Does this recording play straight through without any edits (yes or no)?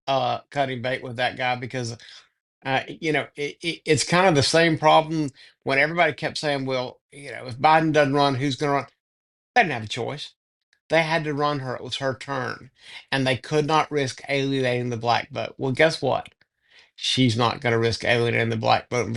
yes